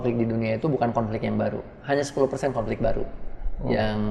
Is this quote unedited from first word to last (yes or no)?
yes